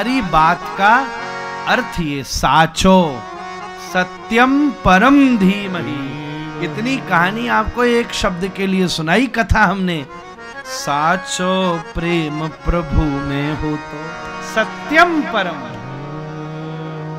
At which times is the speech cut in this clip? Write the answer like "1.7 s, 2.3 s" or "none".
none